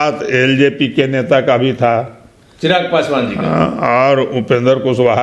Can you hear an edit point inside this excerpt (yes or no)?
no